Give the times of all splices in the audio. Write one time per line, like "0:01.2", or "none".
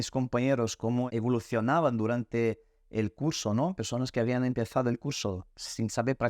0:01.1